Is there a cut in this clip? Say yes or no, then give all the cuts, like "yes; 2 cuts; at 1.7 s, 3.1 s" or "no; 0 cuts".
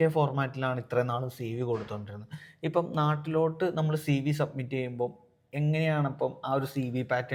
no; 0 cuts